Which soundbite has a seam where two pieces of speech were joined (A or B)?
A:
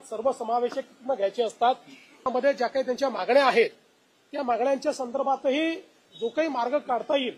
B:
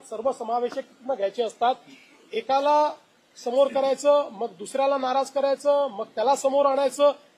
A